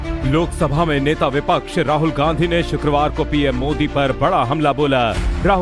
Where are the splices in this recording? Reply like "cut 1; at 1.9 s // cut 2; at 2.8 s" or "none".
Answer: cut 1; at 3.8 s